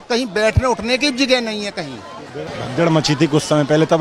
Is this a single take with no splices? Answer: no; 1 cut; at 2.5 s

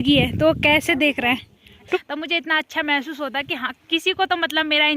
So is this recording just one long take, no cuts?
no; 1 cut; at 2.0 s

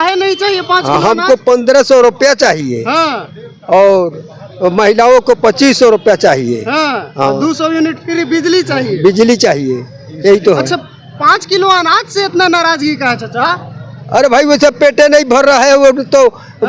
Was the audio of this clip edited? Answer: no; 0 cuts

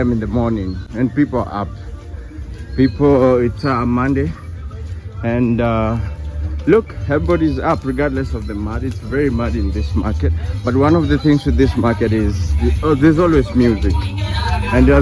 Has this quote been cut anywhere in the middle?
no; 0 cuts

